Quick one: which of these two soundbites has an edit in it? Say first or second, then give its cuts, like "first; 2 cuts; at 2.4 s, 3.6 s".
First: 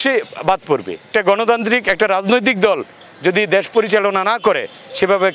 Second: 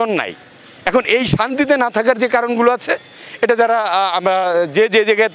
first; 1 cut; at 1.0 s